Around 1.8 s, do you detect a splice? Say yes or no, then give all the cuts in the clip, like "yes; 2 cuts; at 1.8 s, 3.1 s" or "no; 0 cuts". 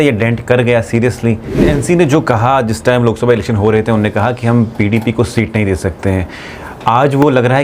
yes; 1 cut; at 1.8 s